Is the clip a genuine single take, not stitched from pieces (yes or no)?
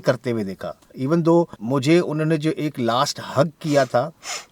no